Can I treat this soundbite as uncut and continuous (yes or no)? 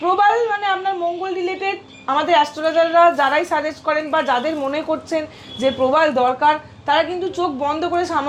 yes